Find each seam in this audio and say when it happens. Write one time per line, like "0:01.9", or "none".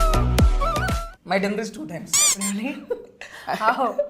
0:01.0